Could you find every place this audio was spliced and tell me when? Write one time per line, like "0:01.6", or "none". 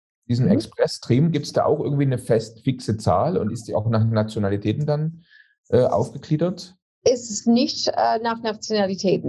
none